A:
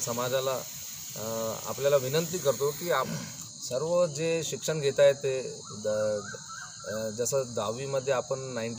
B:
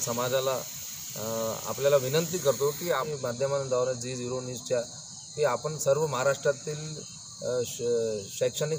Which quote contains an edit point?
B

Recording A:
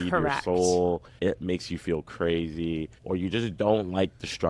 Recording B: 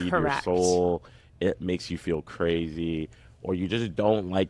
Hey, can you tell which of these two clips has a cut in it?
A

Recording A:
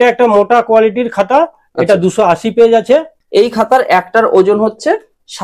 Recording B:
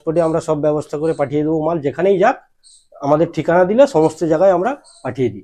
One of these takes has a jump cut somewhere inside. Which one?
A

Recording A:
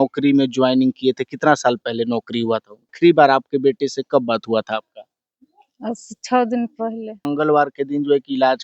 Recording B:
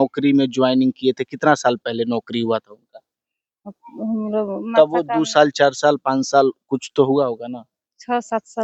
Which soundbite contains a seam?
A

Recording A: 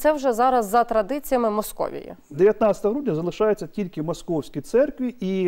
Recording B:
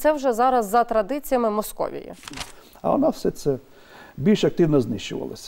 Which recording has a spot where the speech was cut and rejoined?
B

